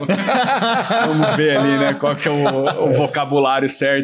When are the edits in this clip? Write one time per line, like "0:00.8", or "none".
none